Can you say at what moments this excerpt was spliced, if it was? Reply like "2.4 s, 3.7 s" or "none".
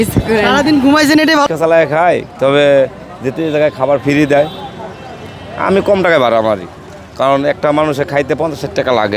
1.5 s

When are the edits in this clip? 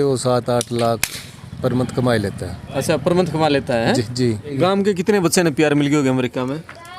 4.5 s

